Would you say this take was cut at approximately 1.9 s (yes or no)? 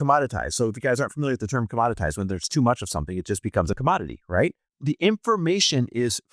no